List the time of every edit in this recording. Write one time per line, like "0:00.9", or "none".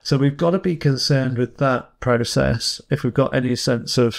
none